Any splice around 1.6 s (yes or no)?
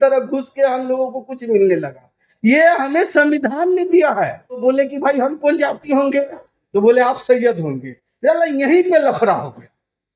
no